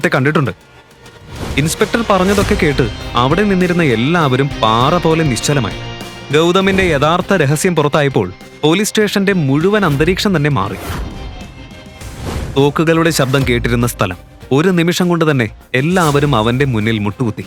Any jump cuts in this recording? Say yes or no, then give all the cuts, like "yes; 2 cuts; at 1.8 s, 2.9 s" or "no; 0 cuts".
no; 0 cuts